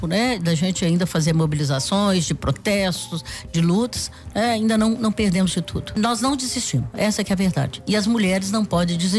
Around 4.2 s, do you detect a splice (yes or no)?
no